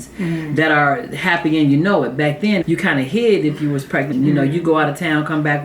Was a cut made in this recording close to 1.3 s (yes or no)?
no